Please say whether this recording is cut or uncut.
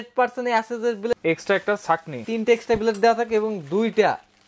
cut